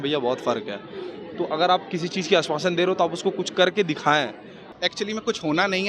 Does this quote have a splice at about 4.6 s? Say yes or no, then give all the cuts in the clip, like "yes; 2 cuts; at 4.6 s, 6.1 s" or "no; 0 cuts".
yes; 1 cut; at 4.6 s